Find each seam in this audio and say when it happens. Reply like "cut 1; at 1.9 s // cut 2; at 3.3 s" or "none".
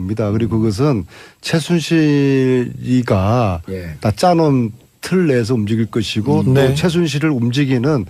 cut 1; at 5.6 s